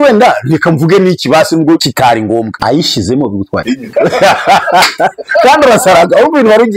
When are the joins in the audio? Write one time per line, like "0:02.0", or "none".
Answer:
0:02.0
0:03.8